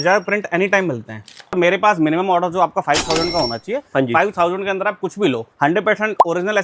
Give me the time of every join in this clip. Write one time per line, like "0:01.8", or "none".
0:01.6
0:05.5